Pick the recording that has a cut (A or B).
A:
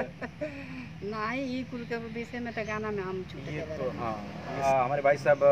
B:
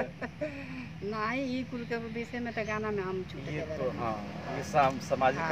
A